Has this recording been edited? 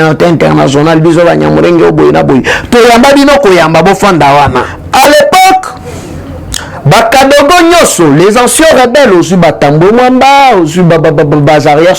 yes; 1 cut; at 4.8 s

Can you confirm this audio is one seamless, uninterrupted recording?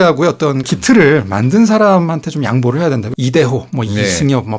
no; 1 cut; at 3.0 s

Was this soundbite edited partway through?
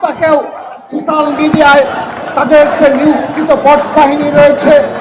no; 0 cuts

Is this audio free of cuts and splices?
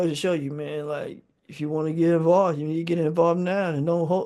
yes; 0 cuts

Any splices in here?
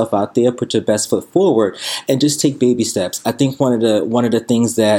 no; 0 cuts

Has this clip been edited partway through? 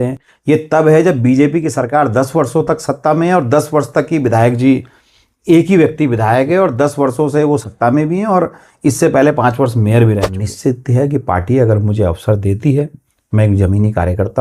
yes; 1 cut; at 10.4 s

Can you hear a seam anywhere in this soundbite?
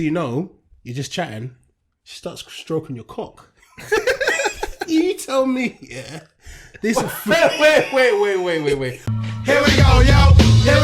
yes; 1 cut; at 9.0 s

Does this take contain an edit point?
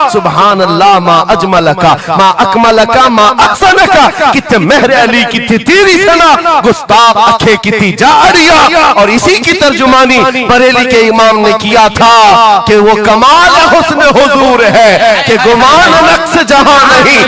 no; 0 cuts

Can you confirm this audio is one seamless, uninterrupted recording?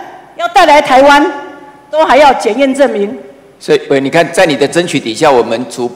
yes; 0 cuts

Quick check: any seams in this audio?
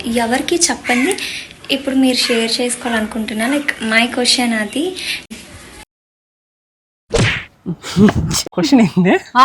yes; 2 cuts; at 5.2 s, 8.3 s

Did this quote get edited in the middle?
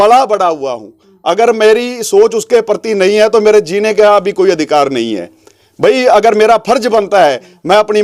no; 0 cuts

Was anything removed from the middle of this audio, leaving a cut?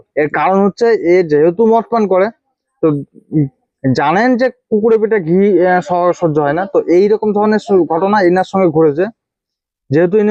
no; 0 cuts

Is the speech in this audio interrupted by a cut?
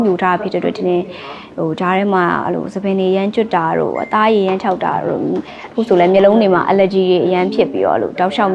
no; 0 cuts

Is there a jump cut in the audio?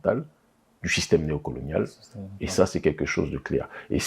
no; 0 cuts

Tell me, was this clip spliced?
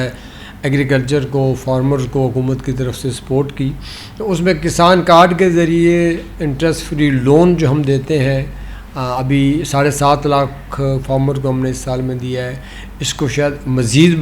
no; 0 cuts

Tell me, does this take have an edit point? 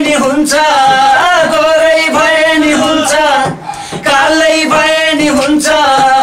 no; 0 cuts

